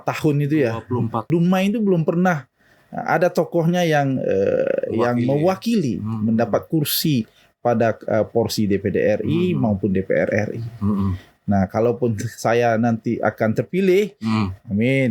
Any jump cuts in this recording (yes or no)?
yes